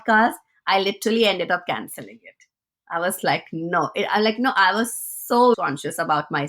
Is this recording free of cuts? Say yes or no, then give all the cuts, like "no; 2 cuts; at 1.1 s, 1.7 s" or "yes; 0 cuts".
no; 1 cut; at 5.6 s